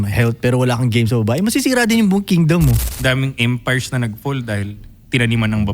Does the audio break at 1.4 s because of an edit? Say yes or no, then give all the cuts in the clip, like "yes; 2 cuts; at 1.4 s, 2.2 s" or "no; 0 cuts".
no; 1 cut; at 2.9 s